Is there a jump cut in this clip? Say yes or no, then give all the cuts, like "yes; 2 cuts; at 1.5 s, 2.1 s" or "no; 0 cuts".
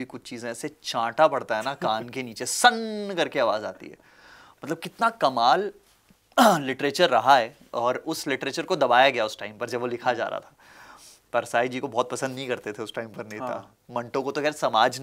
no; 0 cuts